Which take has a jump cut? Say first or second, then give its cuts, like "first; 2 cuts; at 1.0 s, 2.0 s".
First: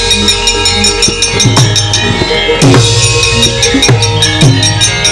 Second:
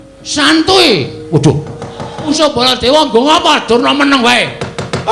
second; 1 cut; at 2.3 s